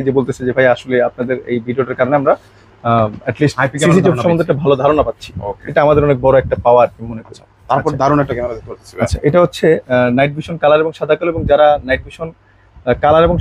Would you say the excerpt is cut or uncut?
uncut